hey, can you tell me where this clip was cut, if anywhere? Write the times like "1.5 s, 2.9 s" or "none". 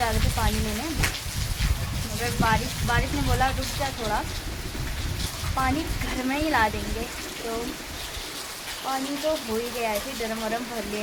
none